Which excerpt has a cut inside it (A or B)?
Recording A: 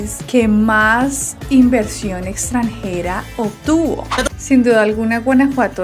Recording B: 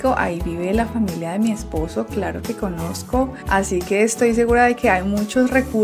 A